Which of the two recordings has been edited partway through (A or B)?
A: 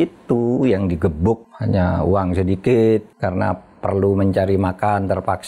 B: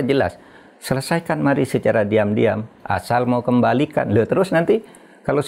A